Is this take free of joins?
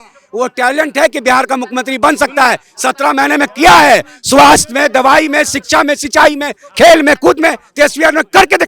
yes; 0 cuts

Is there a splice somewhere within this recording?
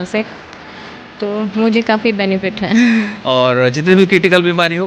yes; 1 cut; at 3.2 s

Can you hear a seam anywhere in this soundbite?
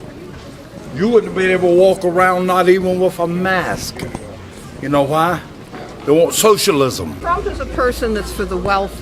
yes; 1 cut; at 7.1 s

